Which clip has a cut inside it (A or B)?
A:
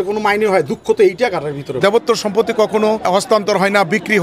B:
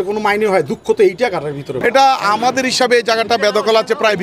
A